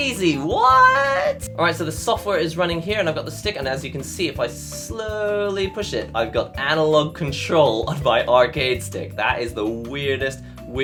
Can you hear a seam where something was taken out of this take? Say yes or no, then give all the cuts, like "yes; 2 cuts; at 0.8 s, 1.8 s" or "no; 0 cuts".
no; 0 cuts